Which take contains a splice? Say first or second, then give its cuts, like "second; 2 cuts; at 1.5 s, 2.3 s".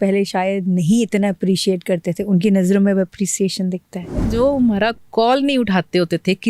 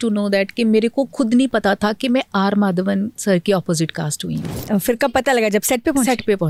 first; 1 cut; at 4.3 s